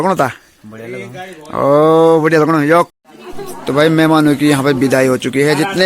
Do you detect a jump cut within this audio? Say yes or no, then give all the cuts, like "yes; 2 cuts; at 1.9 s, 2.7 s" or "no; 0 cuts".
yes; 1 cut; at 2.9 s